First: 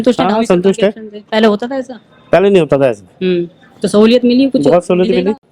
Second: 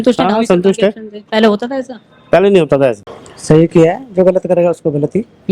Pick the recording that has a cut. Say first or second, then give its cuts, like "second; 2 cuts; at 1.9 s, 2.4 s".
second; 1 cut; at 3.1 s